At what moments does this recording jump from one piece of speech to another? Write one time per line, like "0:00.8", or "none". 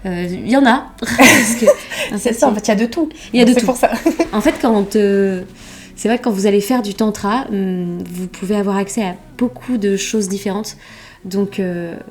none